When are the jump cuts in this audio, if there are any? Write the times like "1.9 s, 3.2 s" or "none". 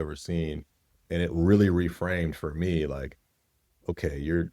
1.0 s